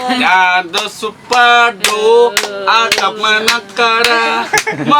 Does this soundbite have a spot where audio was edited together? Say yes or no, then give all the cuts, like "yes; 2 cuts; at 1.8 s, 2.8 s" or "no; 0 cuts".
no; 0 cuts